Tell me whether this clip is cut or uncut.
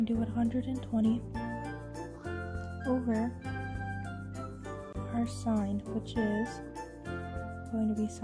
cut